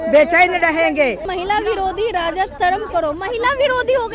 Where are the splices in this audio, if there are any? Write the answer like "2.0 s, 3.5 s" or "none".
1.2 s